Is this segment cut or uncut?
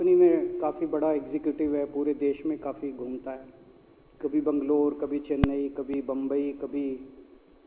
uncut